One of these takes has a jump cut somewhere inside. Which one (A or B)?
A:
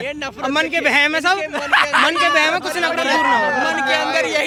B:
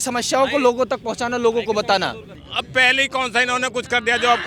B